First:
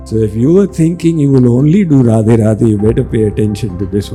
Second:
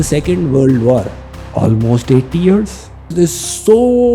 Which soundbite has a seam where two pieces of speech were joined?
second; 2 cuts; at 1.2 s, 3.1 s

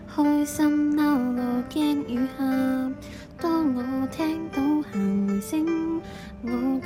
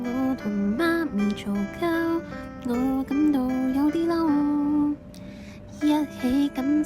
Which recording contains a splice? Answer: second; 1 cut; at 4.7 s

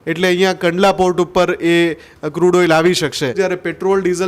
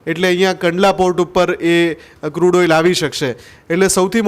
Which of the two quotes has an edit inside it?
first; 1 cut; at 3.4 s

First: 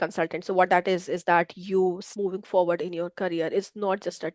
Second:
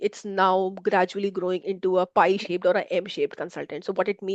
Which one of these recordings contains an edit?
first; 1 cut; at 2.1 s

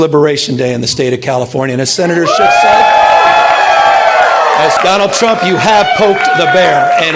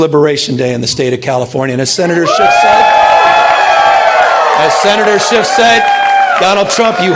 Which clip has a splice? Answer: first; 1 cut; at 4.8 s

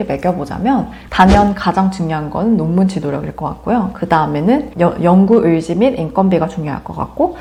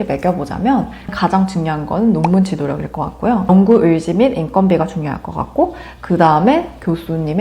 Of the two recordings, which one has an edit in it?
second; 2 cuts; at 1.1 s, 3.5 s

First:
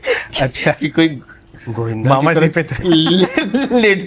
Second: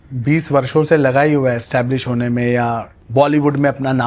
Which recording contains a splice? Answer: second; 1 cut; at 2.9 s

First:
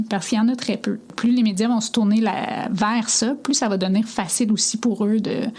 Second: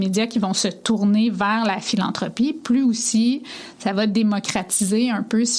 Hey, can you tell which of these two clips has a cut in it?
first; 1 cut; at 1.1 s

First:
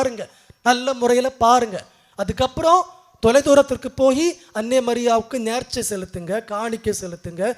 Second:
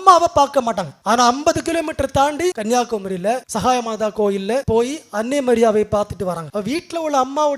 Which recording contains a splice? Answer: second; 5 cuts; at 0.9 s, 2.6 s, 3.5 s, 4.6 s, 6.4 s

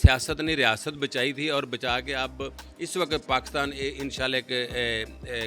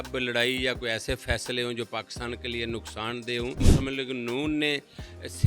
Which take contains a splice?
second; 1 cut; at 3.6 s

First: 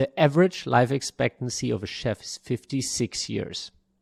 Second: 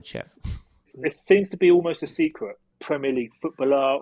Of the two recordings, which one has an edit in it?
second; 2 cuts; at 1.0 s, 2.7 s

